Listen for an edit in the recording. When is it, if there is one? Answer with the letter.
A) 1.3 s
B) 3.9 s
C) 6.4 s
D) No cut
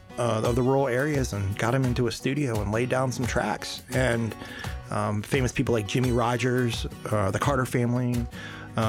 D